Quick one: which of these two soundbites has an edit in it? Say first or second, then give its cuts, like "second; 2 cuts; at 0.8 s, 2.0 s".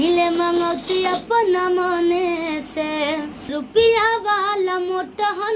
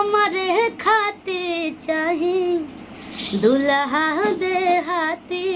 first; 1 cut; at 3.4 s